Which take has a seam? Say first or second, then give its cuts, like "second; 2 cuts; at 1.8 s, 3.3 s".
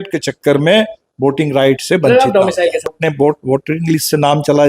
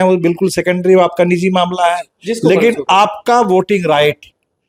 first; 1 cut; at 3.0 s